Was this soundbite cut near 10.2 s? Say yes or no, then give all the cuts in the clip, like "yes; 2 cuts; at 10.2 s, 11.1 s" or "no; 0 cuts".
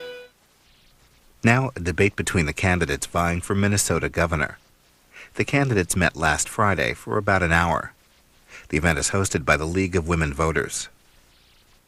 no; 0 cuts